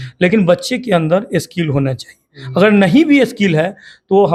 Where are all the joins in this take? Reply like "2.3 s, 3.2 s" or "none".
none